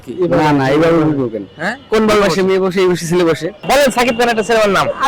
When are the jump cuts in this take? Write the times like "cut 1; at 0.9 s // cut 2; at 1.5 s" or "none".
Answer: cut 1; at 3.6 s